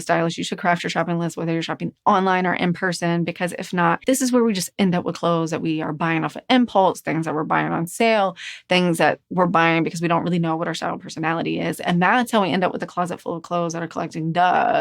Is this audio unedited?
no; 1 cut; at 4.0 s

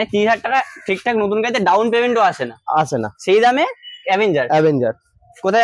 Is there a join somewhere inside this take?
no; 0 cuts

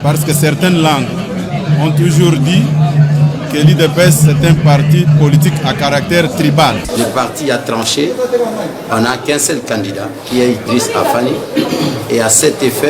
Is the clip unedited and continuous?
no; 1 cut; at 6.8 s

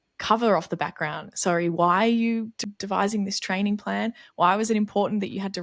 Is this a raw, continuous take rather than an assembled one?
no; 1 cut; at 2.6 s

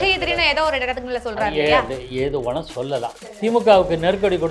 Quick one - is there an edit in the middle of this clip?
yes; 1 cut; at 3.2 s

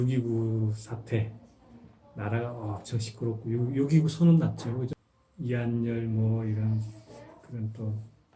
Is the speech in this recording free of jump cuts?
no; 1 cut; at 4.9 s

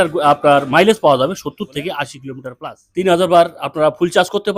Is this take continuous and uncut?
no; 1 cut; at 2.2 s

